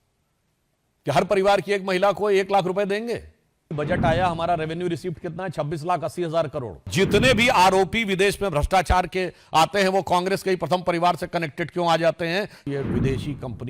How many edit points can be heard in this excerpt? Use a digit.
3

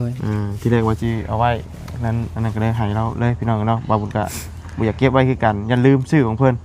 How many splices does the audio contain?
0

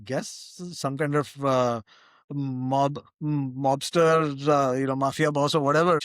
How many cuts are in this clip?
0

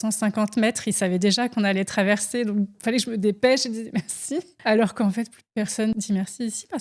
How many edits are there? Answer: 2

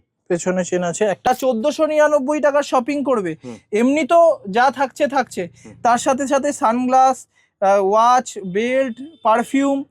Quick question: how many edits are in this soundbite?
1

